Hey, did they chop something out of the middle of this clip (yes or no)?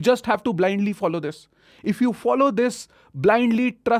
no